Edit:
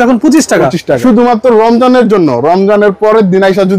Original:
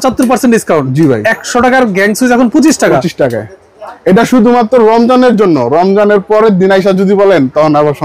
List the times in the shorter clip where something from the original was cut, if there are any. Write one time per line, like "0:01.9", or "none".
0:01.0